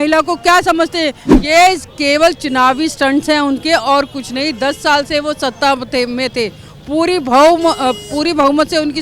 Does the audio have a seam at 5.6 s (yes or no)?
no